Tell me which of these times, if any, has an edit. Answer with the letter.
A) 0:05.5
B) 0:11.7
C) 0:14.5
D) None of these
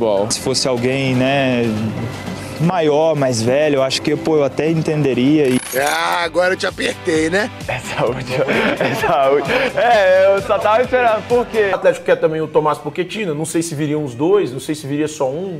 B